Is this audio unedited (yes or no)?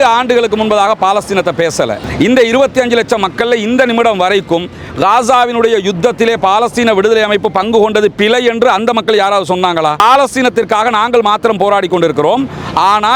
no